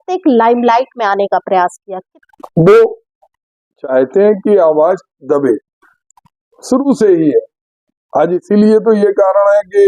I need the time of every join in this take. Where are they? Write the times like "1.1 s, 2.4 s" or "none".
2.1 s